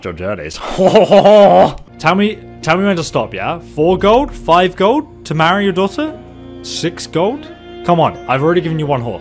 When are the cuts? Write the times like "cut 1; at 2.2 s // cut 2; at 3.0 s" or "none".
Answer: cut 1; at 1.9 s